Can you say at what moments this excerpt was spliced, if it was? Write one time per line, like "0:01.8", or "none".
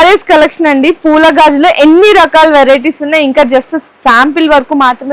none